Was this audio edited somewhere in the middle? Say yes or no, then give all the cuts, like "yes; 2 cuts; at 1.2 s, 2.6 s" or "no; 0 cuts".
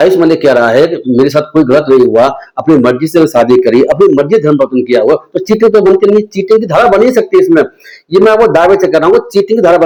no; 0 cuts